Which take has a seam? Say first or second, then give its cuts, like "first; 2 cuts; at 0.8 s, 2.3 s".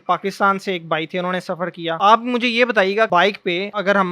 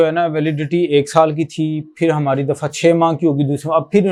first; 2 cuts; at 2.0 s, 3.1 s